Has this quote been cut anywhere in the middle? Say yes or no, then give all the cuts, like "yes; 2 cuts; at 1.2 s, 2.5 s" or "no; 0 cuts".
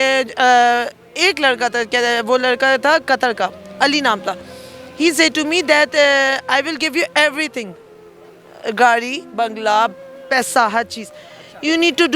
no; 0 cuts